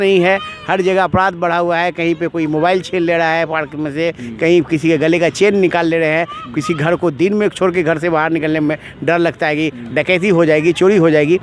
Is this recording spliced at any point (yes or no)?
no